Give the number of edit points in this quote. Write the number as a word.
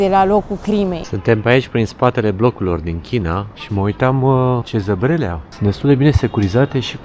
four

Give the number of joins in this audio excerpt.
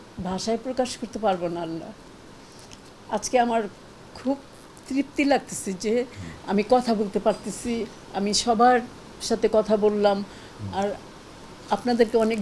zero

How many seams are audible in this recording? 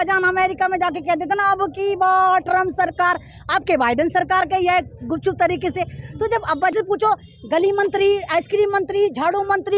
one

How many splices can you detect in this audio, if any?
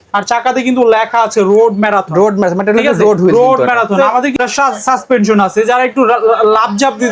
one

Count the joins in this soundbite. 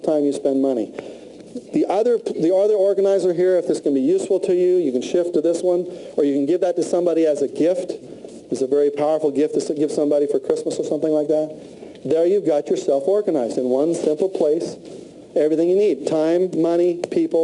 one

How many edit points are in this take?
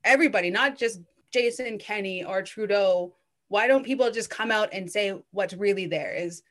one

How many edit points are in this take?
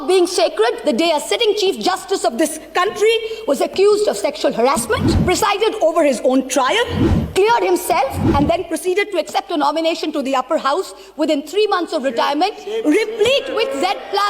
one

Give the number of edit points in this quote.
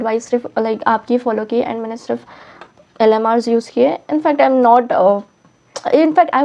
zero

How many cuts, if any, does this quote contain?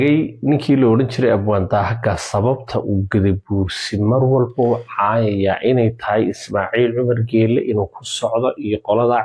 zero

